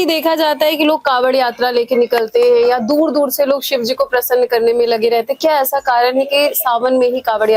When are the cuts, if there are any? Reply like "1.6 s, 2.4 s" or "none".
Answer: none